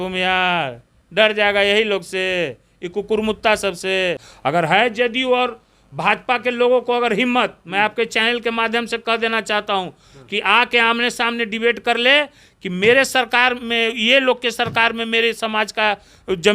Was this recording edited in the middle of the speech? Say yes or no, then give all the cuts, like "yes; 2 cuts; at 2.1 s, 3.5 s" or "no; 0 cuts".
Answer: yes; 1 cut; at 4.3 s